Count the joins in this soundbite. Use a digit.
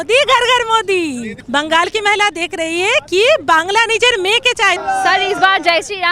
2